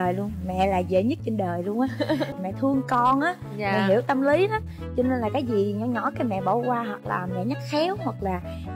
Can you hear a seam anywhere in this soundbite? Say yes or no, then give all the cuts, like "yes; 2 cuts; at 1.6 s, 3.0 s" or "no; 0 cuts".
yes; 1 cut; at 2.3 s